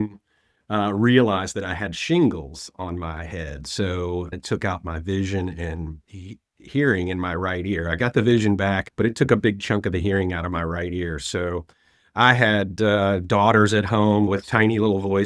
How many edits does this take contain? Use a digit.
3